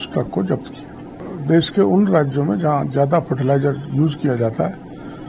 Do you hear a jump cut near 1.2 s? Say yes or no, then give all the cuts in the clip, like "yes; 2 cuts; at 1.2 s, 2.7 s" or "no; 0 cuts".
yes; 1 cut; at 1.2 s